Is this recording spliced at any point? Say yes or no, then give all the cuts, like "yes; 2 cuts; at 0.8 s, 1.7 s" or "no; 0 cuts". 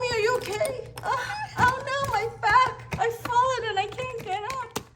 no; 0 cuts